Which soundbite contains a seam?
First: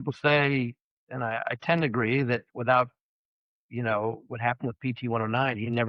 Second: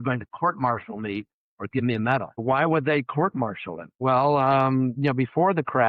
second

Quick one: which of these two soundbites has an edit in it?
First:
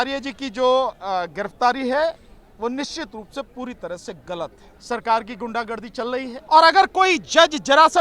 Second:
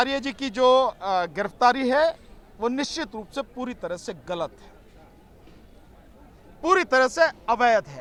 first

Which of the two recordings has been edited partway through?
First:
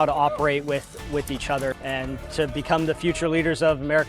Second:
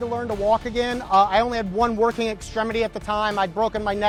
first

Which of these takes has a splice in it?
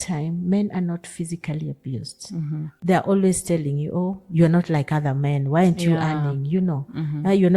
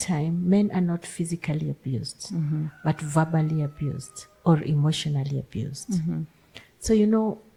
first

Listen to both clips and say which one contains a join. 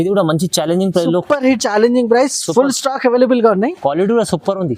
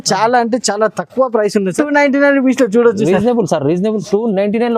second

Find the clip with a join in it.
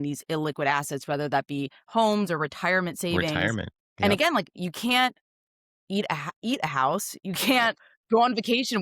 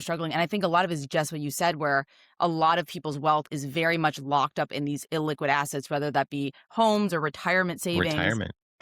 first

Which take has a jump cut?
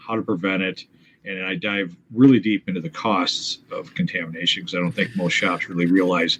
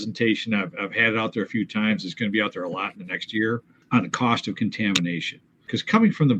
second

